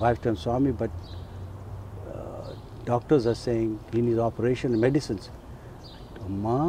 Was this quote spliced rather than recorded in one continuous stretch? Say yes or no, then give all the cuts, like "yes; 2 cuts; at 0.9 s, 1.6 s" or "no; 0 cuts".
no; 0 cuts